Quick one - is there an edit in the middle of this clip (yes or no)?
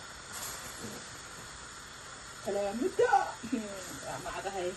no